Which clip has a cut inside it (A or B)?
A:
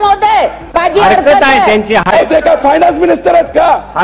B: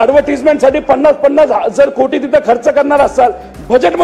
A